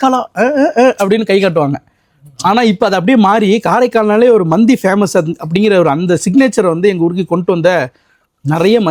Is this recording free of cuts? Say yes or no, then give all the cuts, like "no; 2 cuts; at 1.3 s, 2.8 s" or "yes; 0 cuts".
yes; 0 cuts